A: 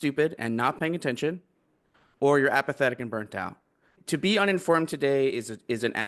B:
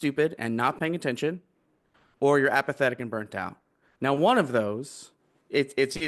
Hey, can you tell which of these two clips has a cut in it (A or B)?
A